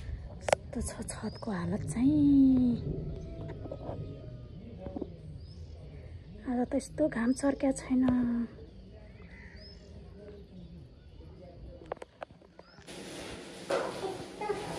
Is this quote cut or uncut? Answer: cut